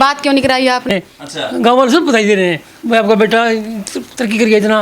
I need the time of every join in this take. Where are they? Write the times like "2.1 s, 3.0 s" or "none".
0.9 s